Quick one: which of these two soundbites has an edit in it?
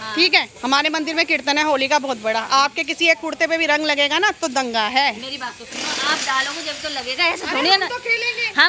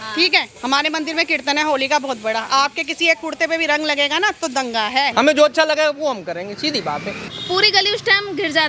second; 2 cuts; at 5.1 s, 7.3 s

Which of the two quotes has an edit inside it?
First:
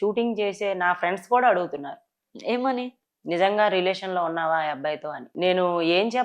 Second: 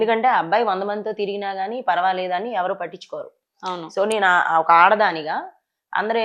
first; 1 cut; at 5.2 s

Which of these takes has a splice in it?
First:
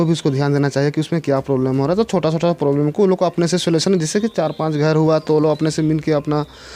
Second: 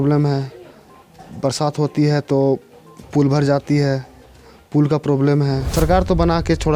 second; 1 cut; at 5.6 s

